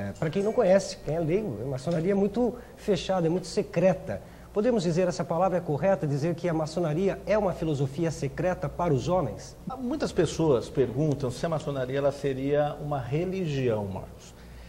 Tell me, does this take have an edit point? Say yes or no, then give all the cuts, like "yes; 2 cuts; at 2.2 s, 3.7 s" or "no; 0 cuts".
yes; 1 cut; at 9.7 s